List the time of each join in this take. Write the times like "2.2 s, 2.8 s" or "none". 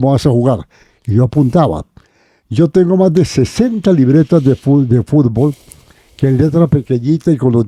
none